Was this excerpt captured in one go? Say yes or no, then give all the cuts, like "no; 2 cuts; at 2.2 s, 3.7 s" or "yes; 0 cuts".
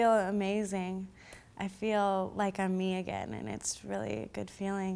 yes; 0 cuts